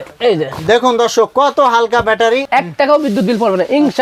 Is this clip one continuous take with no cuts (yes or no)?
no